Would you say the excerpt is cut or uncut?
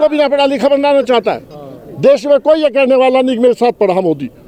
uncut